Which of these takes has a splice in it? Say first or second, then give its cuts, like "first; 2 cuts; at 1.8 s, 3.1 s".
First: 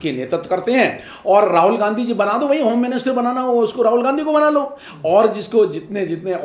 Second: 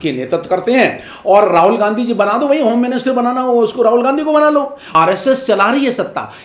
second; 1 cut; at 4.8 s